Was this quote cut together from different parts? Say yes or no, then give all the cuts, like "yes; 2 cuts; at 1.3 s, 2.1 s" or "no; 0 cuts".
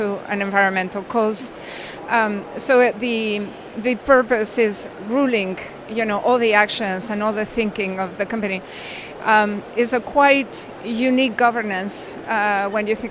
no; 0 cuts